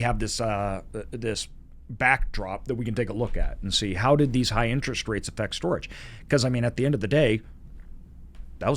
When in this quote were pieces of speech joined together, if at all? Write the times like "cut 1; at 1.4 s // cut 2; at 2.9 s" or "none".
none

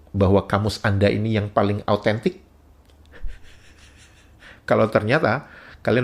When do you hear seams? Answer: none

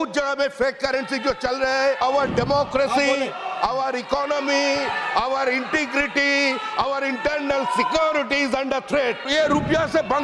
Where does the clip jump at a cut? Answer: cut 1; at 2.0 s // cut 2; at 9.2 s

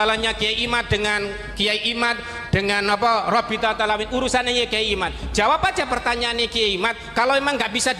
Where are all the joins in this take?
none

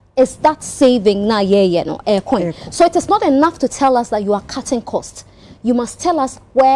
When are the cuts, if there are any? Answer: none

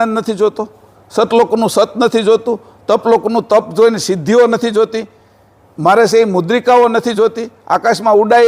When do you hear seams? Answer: none

